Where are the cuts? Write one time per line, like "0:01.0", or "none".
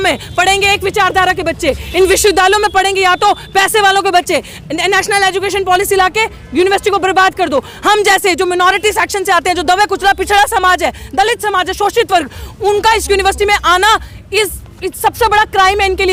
none